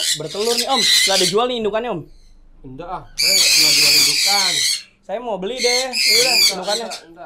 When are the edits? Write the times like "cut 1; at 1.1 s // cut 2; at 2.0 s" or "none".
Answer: none